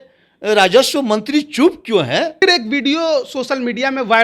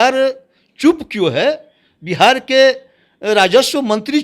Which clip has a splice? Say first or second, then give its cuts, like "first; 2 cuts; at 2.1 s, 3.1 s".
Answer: first; 1 cut; at 2.4 s